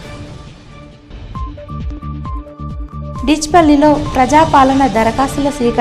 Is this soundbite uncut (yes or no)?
no